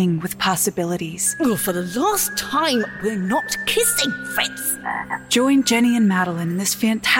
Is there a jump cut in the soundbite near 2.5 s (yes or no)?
no